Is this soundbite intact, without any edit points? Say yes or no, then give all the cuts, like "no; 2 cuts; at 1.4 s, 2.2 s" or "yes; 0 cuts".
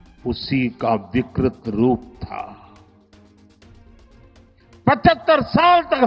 no; 2 cuts; at 2.7 s, 4.8 s